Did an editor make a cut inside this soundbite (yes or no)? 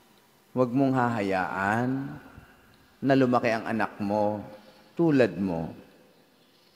no